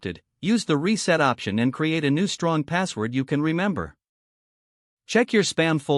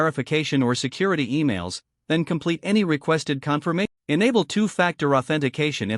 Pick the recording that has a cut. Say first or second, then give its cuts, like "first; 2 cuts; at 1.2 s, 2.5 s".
second; 1 cut; at 3.9 s